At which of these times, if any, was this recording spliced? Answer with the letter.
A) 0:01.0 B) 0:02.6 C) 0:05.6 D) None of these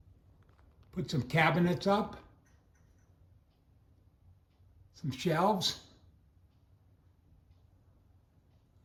D